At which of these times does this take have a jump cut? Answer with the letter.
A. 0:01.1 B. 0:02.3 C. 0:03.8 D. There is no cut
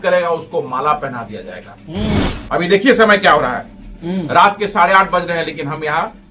B